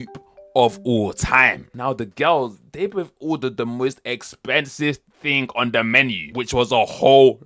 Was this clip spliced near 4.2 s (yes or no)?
no